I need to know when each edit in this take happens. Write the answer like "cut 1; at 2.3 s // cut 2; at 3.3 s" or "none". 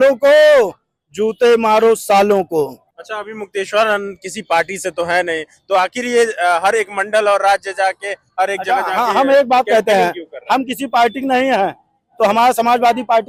none